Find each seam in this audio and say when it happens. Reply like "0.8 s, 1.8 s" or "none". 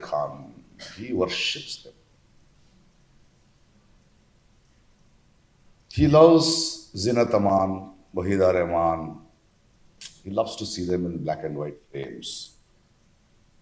none